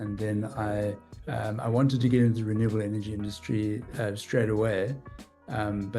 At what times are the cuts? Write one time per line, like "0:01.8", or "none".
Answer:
0:01.1